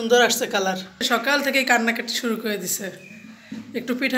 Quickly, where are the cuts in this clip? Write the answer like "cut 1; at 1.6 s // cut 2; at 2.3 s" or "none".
cut 1; at 1.0 s